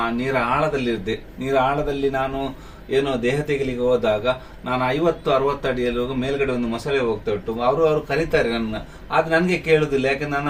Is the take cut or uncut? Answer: uncut